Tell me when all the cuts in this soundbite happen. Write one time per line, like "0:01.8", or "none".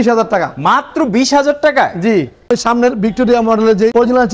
0:02.4